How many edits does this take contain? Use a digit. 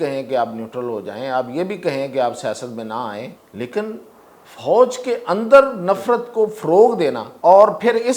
2